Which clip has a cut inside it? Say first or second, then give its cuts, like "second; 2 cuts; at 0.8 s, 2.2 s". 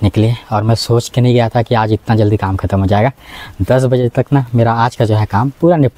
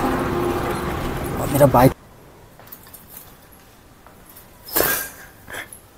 second; 1 cut; at 1.9 s